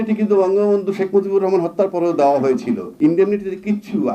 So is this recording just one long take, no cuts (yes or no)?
no